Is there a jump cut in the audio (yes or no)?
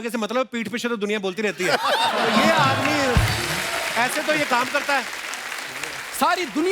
no